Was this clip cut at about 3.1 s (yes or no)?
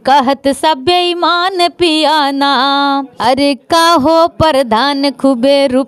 yes